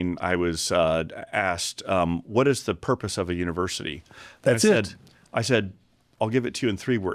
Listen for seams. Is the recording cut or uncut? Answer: uncut